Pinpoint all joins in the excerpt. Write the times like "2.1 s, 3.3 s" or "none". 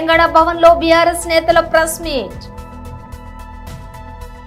none